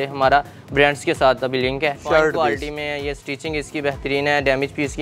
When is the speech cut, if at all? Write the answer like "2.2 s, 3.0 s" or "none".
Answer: 2.0 s